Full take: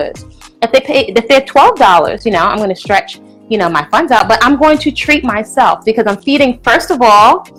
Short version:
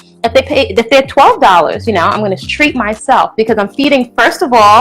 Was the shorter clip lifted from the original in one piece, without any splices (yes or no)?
no